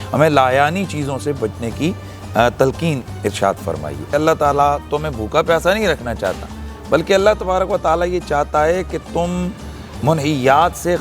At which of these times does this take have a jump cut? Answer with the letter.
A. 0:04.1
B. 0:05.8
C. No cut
A